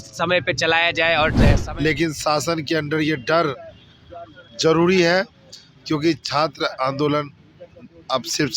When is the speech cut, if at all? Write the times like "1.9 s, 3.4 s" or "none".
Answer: 1.5 s